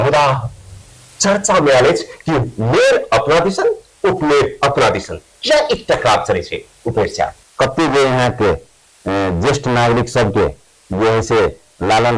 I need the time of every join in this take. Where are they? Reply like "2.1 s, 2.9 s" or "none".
7.4 s